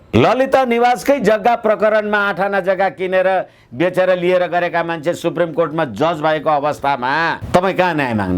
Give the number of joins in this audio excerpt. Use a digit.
0